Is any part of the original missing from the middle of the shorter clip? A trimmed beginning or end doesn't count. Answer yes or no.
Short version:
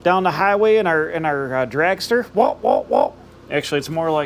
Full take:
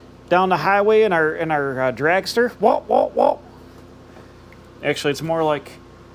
yes